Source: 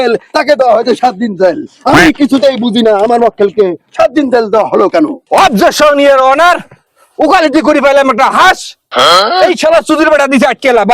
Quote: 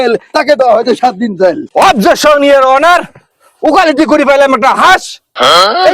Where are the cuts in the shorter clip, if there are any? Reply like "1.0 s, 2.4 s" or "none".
1.6 s